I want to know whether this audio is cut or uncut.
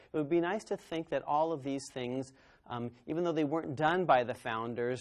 uncut